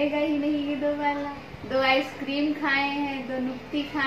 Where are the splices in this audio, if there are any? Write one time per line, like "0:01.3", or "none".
0:01.4